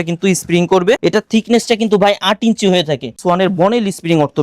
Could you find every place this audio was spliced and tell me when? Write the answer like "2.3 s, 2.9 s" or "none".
1.0 s, 3.2 s